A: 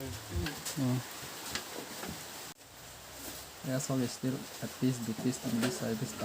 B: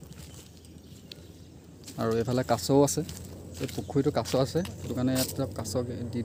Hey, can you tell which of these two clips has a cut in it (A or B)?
A